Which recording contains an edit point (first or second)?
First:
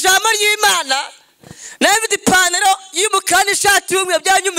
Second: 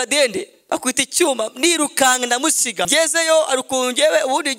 second